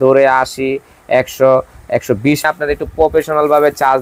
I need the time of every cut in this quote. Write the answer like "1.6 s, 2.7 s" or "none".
2.5 s